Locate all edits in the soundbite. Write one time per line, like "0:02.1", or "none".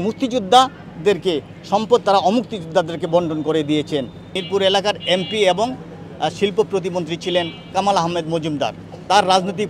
0:04.2